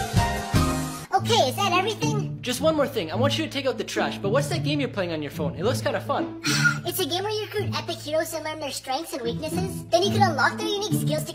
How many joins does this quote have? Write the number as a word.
one